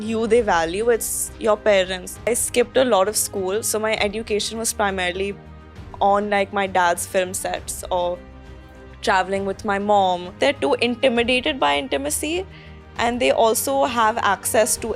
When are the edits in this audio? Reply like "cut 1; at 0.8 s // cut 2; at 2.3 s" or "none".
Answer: cut 1; at 2.2 s // cut 2; at 10.3 s